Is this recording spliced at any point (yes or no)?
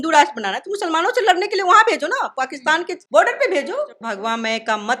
yes